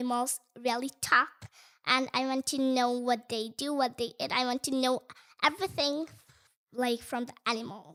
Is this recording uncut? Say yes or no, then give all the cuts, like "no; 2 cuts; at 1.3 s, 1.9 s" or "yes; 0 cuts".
yes; 0 cuts